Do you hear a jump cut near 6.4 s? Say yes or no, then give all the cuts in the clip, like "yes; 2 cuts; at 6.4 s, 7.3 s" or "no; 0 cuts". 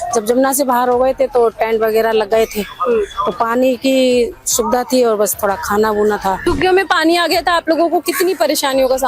yes; 1 cut; at 6.4 s